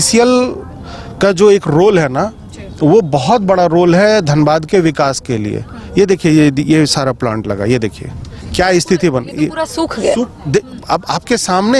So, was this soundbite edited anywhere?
no; 0 cuts

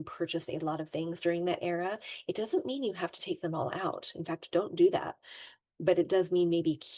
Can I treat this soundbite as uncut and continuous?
yes; 0 cuts

